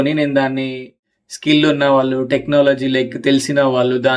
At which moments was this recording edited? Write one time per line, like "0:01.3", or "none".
0:01.1